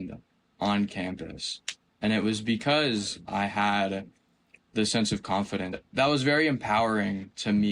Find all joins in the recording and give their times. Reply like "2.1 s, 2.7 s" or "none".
5.8 s